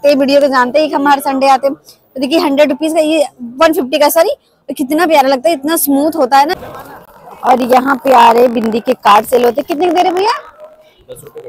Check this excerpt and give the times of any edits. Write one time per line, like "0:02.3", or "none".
0:06.6